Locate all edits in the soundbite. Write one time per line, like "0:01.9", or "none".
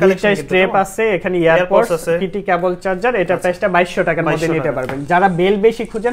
none